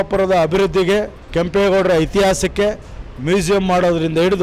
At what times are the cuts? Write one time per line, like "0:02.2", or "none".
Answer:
0:01.2

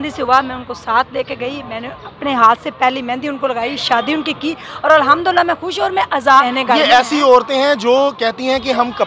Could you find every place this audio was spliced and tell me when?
0:06.4

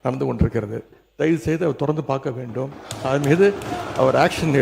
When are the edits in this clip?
0:01.0

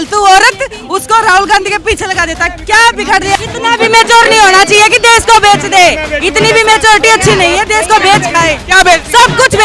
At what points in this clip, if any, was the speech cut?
0:03.4

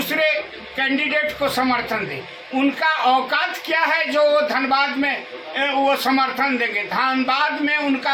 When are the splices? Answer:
none

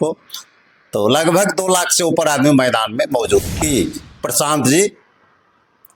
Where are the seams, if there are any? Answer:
0:03.5

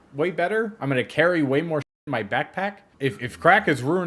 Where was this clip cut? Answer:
0:02.9

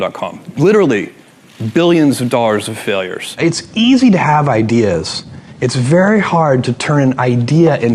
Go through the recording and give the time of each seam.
0:03.2

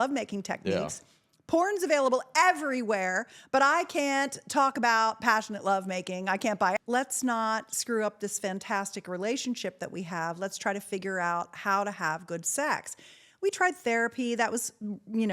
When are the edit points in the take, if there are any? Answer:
0:06.8

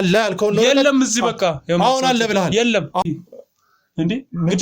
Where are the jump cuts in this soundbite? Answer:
0:03.0

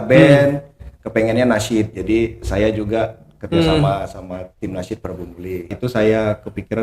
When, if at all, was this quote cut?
0:05.7

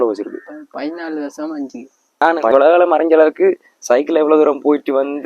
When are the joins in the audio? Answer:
0:02.2

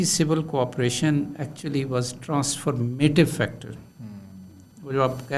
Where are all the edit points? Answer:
none

